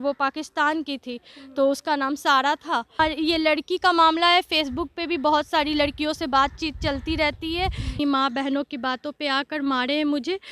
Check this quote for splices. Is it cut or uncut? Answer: cut